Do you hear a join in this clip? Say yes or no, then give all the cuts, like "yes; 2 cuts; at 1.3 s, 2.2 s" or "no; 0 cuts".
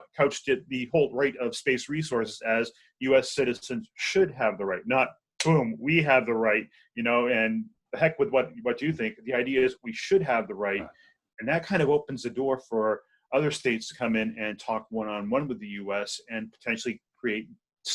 no; 0 cuts